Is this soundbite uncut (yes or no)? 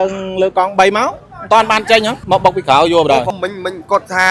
no